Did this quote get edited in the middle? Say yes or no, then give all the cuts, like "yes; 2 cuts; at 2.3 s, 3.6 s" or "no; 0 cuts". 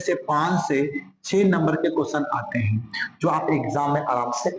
no; 0 cuts